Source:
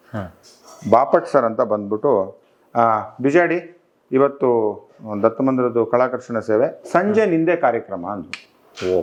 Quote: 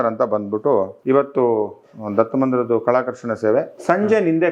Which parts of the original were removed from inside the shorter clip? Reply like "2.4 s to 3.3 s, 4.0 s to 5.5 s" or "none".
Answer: 2.3 s to 4.0 s

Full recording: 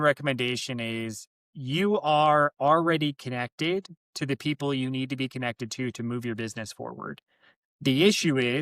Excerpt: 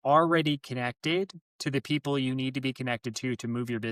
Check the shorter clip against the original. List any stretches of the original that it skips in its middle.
none

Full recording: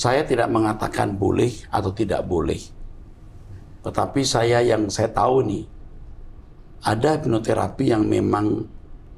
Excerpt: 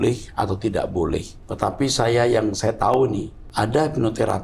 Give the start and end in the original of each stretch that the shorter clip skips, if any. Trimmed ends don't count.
2.7 s to 3.7 s, 5.7 s to 6.7 s

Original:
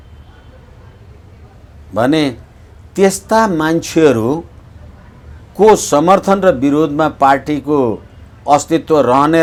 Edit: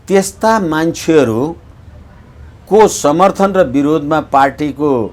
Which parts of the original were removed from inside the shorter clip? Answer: none

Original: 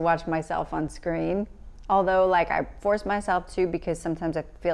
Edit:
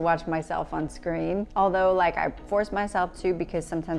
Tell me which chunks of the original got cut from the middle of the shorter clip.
1.5 s to 1.8 s

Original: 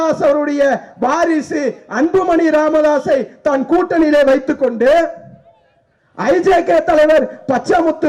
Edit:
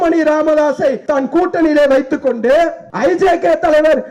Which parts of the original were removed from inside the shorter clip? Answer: 3.3 s to 3.4 s, 5.2 s to 6.1 s

